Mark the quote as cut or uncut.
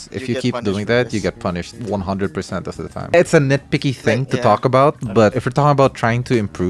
uncut